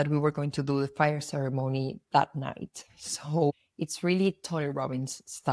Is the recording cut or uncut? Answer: uncut